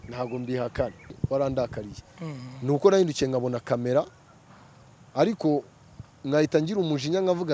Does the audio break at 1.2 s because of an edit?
yes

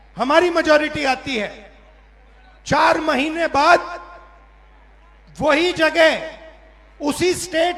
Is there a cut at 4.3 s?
no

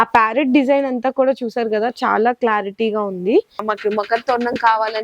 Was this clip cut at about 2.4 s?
no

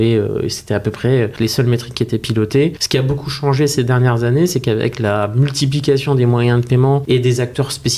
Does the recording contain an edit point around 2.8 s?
yes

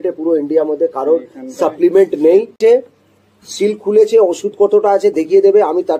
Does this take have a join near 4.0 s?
no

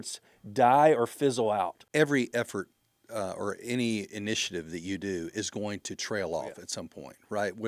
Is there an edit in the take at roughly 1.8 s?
yes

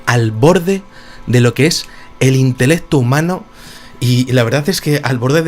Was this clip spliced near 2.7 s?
yes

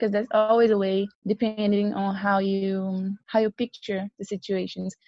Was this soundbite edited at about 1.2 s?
yes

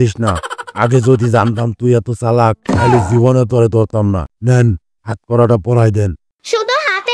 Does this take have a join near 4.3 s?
yes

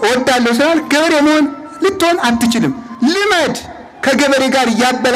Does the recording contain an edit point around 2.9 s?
yes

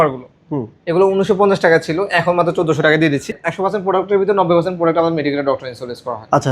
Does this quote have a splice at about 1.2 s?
no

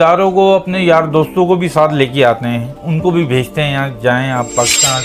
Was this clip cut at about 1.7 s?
no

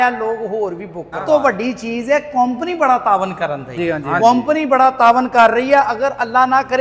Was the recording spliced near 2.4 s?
no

